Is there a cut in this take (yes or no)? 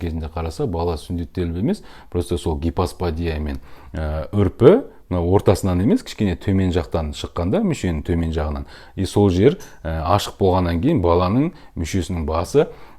no